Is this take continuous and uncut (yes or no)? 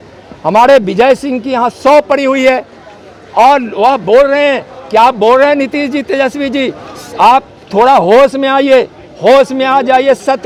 yes